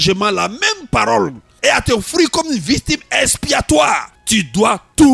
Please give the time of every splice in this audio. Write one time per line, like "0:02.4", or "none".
0:01.4
0:04.1